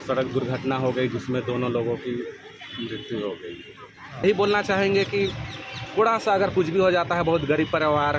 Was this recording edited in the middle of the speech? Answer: yes; 1 cut; at 4.2 s

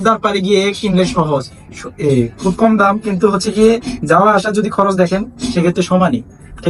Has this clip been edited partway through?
no; 0 cuts

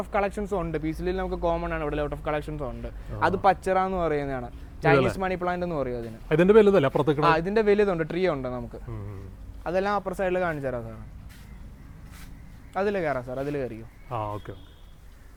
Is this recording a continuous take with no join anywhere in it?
yes; 0 cuts

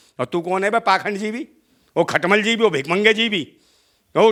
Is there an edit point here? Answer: no; 0 cuts

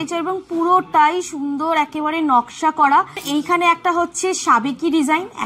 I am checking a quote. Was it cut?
yes; 1 cut; at 3.2 s

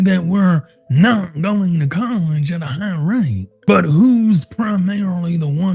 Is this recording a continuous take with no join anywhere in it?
no; 1 cut; at 3.5 s

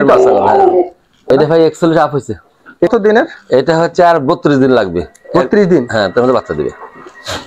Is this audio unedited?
no; 2 cuts; at 1.3 s, 2.9 s

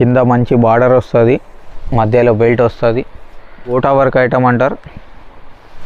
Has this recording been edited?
yes; 1 cut; at 3.7 s

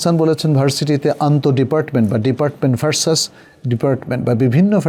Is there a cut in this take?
no; 0 cuts

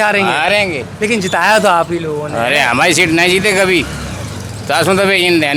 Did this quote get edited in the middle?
no; 0 cuts

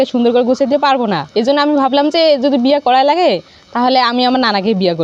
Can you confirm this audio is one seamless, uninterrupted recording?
yes; 0 cuts

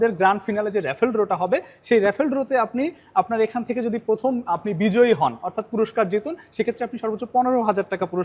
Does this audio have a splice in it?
no; 0 cuts

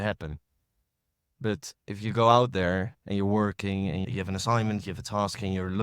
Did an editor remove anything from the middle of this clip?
yes; 1 cut; at 4.0 s

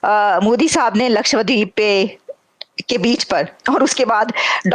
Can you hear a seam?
no; 0 cuts

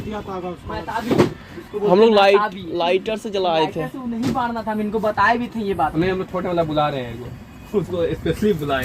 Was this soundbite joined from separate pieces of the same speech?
yes; 1 cut; at 5.9 s

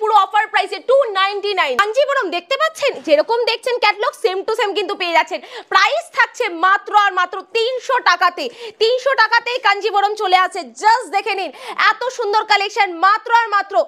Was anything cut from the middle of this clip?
no; 0 cuts

